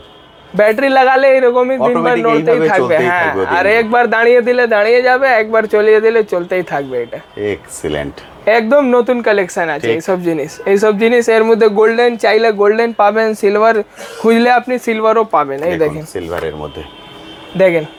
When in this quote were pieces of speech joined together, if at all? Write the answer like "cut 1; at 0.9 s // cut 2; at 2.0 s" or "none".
none